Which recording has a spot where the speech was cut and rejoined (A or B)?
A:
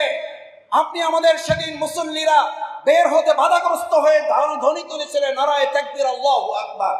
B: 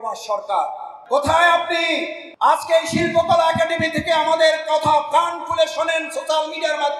B